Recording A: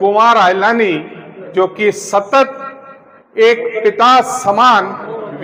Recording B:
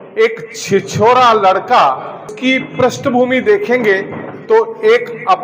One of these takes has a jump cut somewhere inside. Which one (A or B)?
B